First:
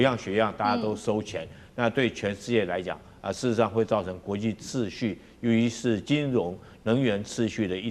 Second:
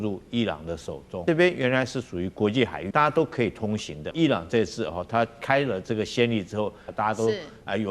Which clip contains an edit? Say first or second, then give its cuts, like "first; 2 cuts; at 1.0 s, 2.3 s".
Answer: second; 4 cuts; at 1.2 s, 2.8 s, 4.1 s, 6.8 s